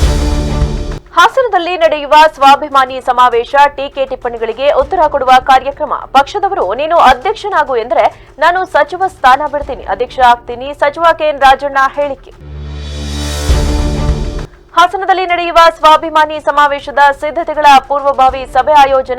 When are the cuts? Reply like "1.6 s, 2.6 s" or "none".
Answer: 1.0 s